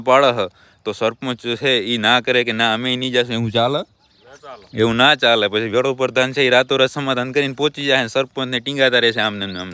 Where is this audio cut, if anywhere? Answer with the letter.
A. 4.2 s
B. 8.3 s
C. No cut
C